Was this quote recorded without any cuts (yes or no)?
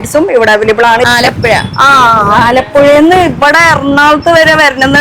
no